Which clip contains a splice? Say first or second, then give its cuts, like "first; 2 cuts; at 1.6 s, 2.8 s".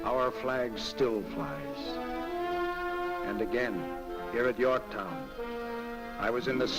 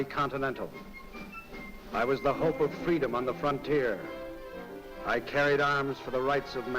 second; 1 cut; at 3.3 s